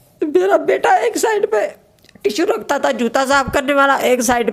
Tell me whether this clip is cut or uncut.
uncut